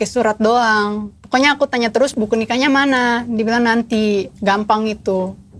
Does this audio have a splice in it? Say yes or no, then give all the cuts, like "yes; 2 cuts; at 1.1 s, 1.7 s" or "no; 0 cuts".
yes; 2 cuts; at 1.1 s, 2.1 s